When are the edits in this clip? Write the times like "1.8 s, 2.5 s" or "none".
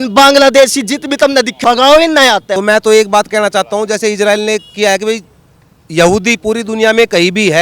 2.5 s